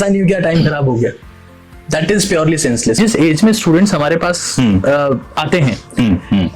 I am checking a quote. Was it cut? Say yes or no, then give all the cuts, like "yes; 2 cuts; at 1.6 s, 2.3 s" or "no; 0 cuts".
yes; 1 cut; at 3.0 s